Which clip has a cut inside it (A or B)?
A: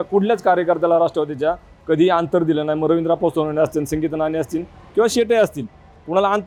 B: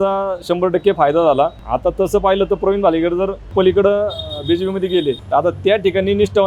B